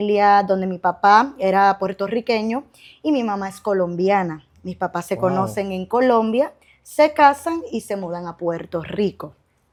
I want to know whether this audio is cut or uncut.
uncut